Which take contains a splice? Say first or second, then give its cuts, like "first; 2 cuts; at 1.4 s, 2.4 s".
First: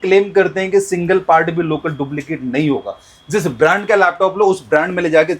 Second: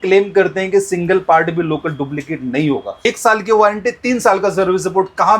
second; 1 cut; at 3.0 s